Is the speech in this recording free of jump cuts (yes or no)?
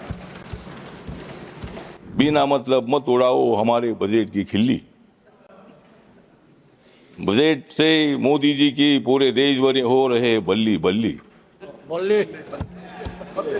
no